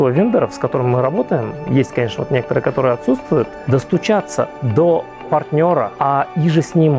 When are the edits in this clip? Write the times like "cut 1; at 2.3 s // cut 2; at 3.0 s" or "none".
cut 1; at 3.5 s // cut 2; at 5.9 s